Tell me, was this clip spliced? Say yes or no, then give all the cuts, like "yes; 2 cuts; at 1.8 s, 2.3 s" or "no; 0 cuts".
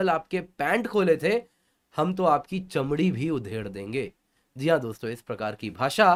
no; 0 cuts